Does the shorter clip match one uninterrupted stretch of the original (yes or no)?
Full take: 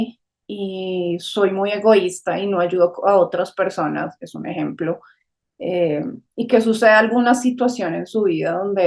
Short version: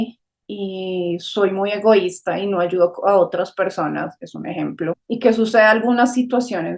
no